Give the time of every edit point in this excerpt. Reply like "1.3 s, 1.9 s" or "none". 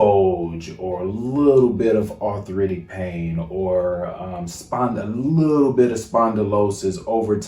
none